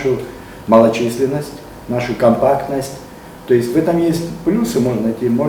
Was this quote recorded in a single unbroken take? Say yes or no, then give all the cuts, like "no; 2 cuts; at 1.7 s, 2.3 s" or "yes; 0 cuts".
yes; 0 cuts